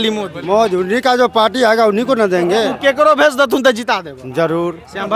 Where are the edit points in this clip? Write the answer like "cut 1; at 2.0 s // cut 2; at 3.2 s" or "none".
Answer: none